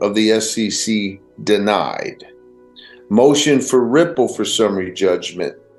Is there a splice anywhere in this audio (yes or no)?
no